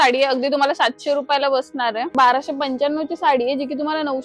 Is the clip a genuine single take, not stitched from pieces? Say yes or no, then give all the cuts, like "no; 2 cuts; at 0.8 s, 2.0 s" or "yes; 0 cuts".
no; 1 cut; at 2.1 s